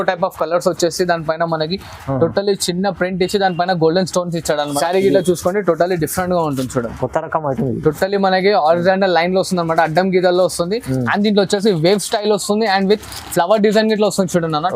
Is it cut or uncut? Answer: cut